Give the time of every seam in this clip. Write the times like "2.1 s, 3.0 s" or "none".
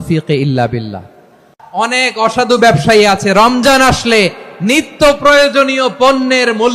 1.5 s